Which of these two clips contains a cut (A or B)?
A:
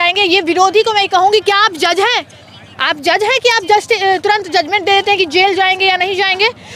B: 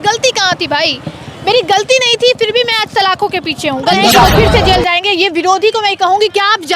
B